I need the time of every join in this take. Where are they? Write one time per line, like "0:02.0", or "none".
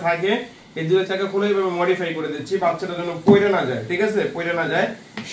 none